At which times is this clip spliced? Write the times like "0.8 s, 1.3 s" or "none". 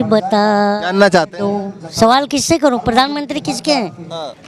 1.8 s